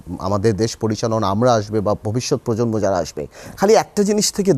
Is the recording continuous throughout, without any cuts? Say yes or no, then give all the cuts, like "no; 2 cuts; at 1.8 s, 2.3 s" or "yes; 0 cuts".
yes; 0 cuts